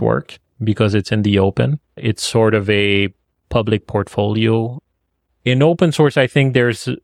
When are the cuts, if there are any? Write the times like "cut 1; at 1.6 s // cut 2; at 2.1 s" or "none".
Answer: cut 1; at 4.7 s